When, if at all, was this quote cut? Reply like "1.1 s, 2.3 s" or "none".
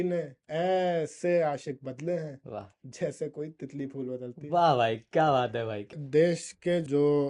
5.9 s